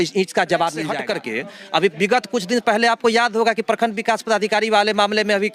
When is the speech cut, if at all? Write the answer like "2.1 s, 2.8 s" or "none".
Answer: 0.9 s